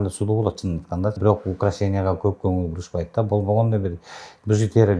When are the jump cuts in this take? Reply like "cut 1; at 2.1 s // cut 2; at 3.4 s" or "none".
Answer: cut 1; at 1.2 s